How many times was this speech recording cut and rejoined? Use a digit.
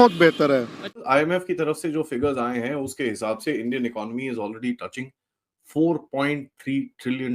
1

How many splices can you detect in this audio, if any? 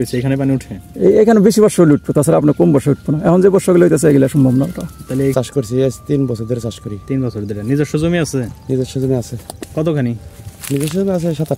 1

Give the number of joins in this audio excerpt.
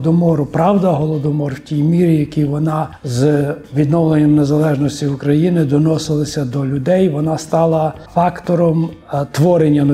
2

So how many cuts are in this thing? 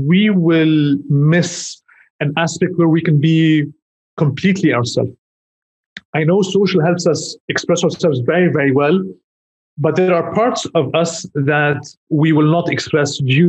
0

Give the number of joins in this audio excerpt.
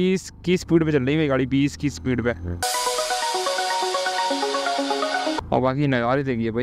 2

